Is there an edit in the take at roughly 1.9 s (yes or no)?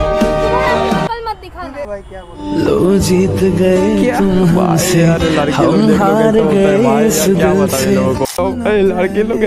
yes